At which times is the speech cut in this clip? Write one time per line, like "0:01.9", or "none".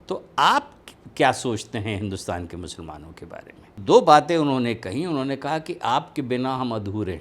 0:03.8

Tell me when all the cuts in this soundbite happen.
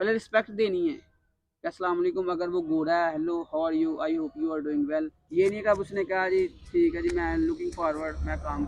0:05.2

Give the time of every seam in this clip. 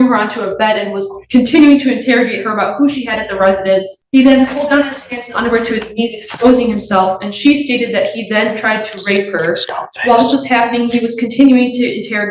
0:04.0

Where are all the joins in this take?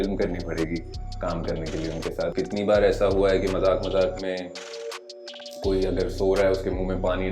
0:02.3

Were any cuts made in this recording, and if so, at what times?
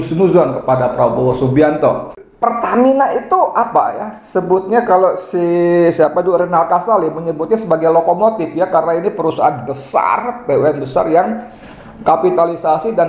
0:02.2

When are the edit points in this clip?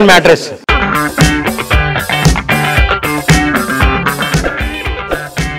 none

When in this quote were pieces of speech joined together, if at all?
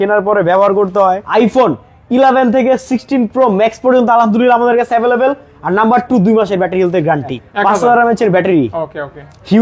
0:01.2
0:07.4

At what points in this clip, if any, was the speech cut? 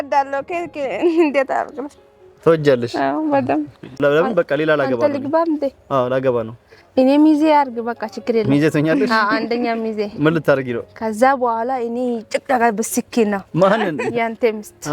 0:04.0

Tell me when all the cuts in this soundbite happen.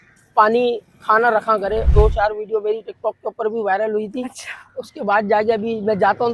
0:01.9

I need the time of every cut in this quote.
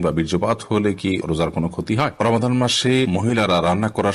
0:02.1
0:03.1

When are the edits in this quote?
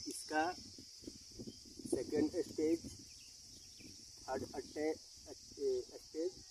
none

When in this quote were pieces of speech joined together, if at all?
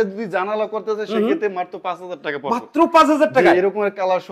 none

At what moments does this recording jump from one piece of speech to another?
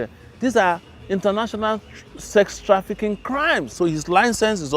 0:03.7

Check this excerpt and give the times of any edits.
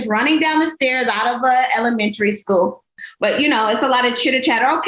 0:03.0

